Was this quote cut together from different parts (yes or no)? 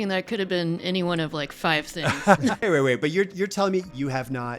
yes